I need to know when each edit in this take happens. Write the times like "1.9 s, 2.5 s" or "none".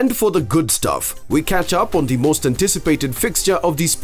1.1 s

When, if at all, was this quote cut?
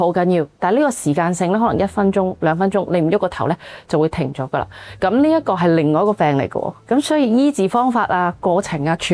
none

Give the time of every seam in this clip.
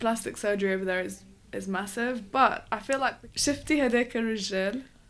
3.0 s

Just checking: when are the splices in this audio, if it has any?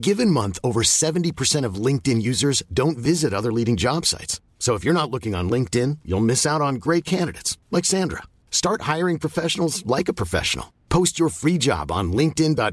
none

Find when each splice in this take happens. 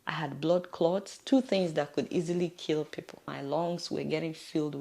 3.3 s

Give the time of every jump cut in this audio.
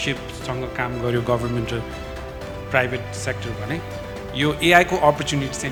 none

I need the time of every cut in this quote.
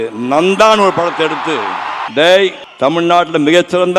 2.0 s, 2.6 s

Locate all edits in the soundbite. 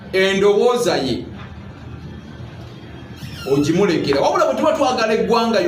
none

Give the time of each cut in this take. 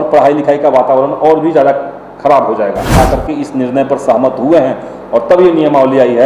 2.9 s

